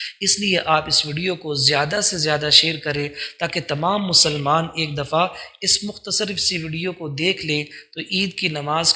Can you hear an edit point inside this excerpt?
no; 0 cuts

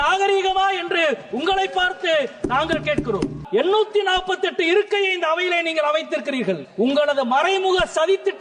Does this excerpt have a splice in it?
yes; 2 cuts; at 3.4 s, 6.7 s

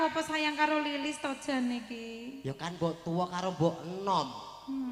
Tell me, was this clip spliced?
no; 0 cuts

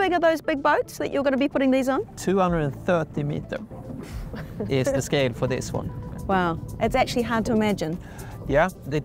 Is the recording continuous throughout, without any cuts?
yes; 0 cuts

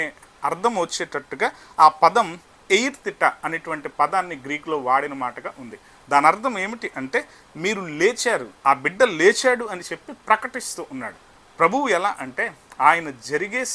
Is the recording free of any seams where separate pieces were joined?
yes; 0 cuts

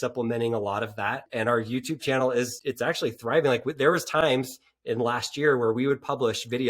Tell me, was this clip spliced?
yes; 2 cuts; at 1.3 s, 2.5 s

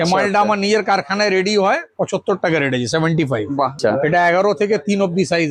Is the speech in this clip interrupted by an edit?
yes; 1 cut; at 3.8 s

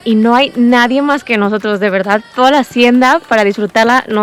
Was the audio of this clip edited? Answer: no; 0 cuts

